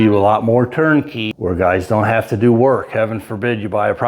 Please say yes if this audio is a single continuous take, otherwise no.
no